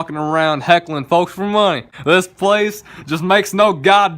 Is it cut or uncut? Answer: cut